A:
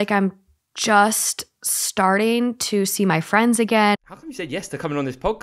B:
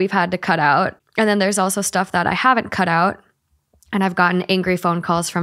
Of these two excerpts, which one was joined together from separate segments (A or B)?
A